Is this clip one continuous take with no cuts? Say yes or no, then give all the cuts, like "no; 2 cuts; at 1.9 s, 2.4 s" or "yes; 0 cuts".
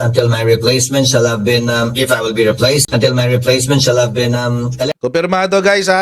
no; 1 cut; at 4.9 s